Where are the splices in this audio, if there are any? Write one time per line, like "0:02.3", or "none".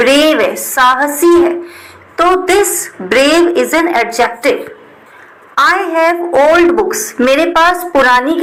none